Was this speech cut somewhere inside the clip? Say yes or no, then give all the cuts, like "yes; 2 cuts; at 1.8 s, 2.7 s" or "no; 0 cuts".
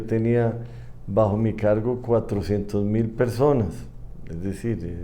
no; 0 cuts